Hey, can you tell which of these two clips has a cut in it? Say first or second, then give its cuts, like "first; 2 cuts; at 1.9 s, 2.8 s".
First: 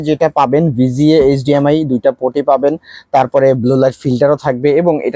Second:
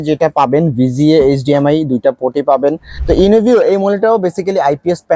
second; 1 cut; at 2.9 s